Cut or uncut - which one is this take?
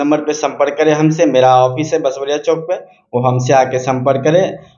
uncut